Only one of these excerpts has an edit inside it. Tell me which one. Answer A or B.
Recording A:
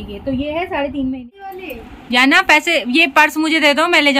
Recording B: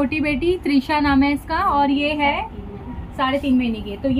A